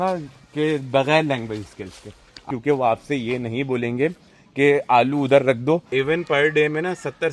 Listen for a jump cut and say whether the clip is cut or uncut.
cut